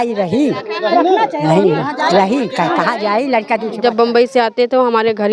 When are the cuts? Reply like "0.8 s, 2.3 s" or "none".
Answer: 3.7 s